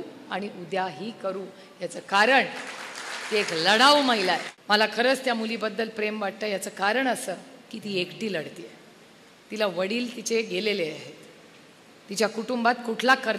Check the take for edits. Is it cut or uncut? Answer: cut